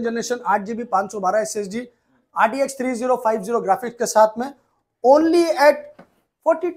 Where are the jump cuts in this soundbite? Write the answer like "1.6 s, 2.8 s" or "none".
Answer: none